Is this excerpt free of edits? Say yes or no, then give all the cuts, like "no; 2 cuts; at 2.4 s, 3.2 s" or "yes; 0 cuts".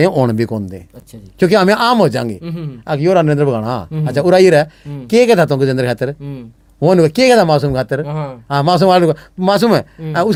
yes; 0 cuts